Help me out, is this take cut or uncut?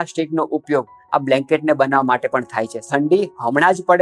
cut